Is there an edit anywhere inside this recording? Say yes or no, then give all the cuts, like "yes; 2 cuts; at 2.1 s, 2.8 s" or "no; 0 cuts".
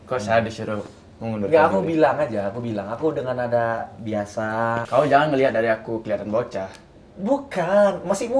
yes; 1 cut; at 4.8 s